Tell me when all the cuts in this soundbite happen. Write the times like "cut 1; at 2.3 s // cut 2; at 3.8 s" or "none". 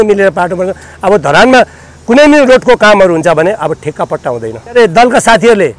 cut 1; at 4.7 s